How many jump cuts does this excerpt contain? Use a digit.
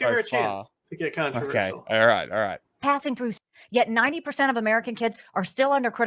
1